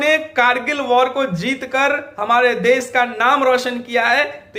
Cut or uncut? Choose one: uncut